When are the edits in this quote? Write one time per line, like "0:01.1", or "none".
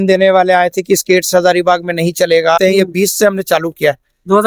0:02.6